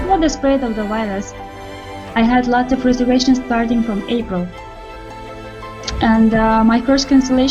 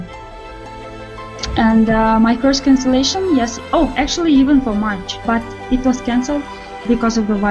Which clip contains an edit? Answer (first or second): second